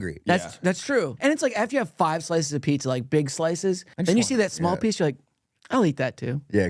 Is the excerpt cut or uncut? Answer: cut